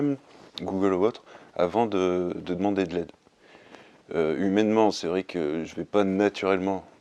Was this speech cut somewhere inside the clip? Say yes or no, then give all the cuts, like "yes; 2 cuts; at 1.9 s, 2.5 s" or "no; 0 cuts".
no; 0 cuts